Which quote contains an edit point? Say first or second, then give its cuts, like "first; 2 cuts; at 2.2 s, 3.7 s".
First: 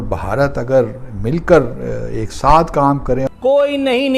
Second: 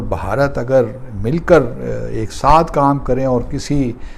first; 1 cut; at 3.3 s